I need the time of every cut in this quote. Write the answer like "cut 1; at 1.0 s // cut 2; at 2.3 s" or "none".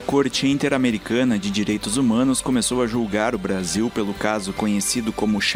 none